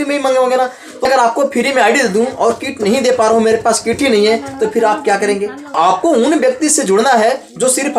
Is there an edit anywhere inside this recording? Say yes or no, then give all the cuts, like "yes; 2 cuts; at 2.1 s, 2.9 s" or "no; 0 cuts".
yes; 2 cuts; at 0.9 s, 5.7 s